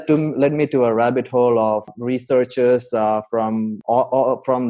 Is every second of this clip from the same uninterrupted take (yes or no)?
no